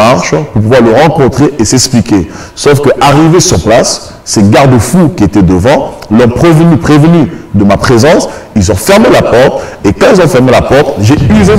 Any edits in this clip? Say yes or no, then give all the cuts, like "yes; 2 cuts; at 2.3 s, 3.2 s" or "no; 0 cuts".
no; 0 cuts